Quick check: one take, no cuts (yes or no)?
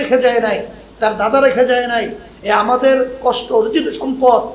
yes